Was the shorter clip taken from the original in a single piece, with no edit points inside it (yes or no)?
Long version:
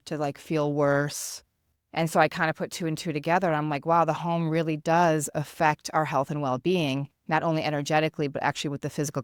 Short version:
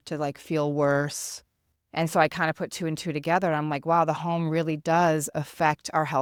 yes